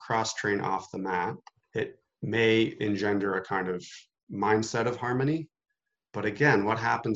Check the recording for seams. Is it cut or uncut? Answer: cut